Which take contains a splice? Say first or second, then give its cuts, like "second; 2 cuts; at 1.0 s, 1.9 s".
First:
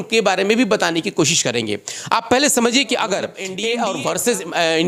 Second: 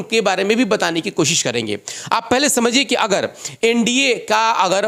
first; 1 cut; at 3.5 s